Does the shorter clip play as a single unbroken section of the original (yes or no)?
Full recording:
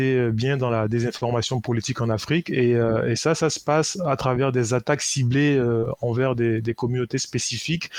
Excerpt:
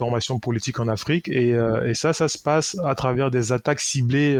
yes